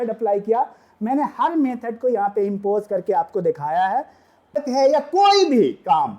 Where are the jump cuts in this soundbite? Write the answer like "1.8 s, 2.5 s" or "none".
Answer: 4.6 s